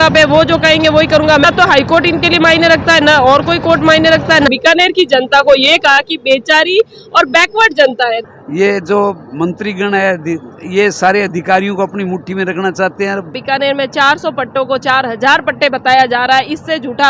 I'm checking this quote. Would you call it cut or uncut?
cut